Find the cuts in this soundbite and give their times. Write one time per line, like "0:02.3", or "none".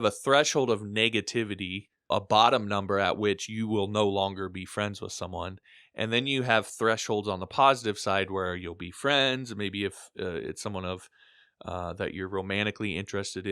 0:02.1